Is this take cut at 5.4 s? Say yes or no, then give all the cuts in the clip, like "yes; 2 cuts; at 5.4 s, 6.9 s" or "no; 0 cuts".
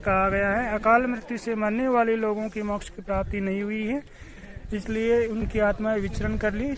yes; 1 cut; at 5.4 s